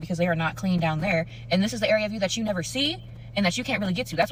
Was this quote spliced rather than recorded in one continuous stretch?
no; 0 cuts

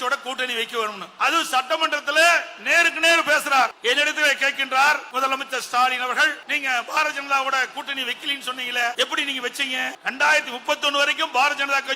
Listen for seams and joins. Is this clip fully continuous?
no; 6 cuts; at 1.1 s, 3.8 s, 5.1 s, 6.5 s, 8.9 s, 10.0 s

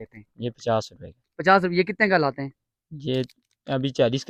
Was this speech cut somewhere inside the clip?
no; 0 cuts

